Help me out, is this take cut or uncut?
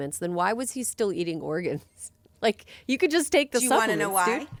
uncut